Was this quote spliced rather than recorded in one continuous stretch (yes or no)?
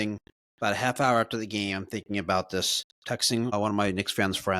yes